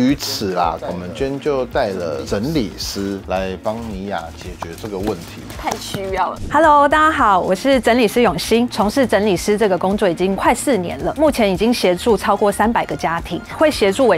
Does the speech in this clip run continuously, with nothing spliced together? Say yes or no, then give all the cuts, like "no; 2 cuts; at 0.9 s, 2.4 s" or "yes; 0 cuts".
yes; 0 cuts